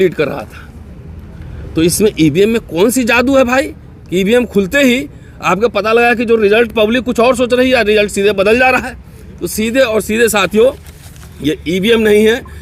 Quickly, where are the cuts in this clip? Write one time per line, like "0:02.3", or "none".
none

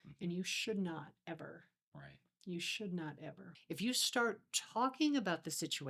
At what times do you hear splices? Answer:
0:03.5

